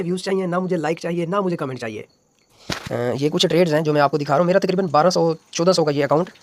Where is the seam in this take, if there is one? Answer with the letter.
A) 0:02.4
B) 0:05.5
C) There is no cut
A